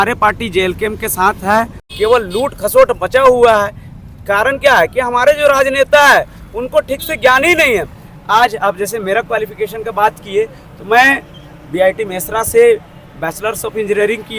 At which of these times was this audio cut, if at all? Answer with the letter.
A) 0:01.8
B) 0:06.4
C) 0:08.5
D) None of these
A